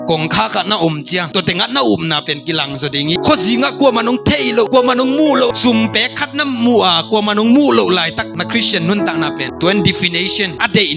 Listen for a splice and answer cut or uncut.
cut